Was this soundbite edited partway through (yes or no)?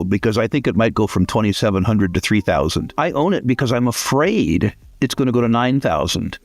yes